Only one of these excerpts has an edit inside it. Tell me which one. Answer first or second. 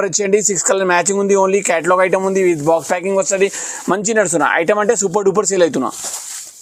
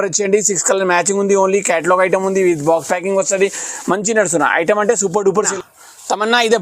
second